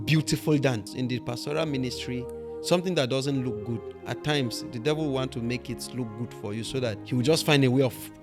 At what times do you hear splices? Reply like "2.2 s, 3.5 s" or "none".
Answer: 0.9 s, 7.0 s

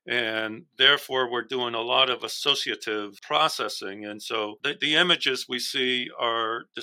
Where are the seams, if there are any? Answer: 3.2 s, 4.6 s

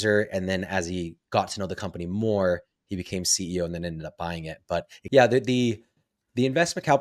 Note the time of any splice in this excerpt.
5.0 s

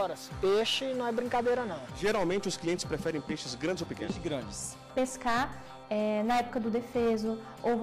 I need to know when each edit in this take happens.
1.8 s, 4.9 s

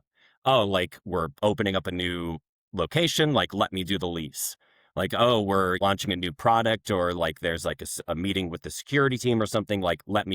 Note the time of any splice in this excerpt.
5.8 s

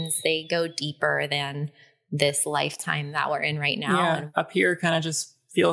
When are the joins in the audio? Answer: 4.3 s

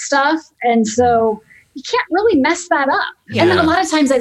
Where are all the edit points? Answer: 3.3 s

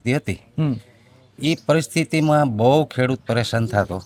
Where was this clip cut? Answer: none

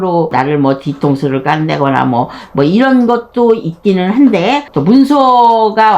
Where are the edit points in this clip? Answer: 4.7 s

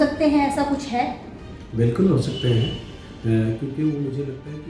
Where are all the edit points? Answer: none

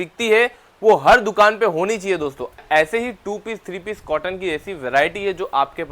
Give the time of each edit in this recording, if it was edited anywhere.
2.6 s

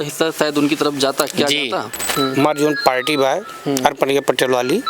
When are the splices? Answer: 2.1 s

